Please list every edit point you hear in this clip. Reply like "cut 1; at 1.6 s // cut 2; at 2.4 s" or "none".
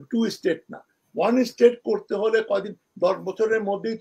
none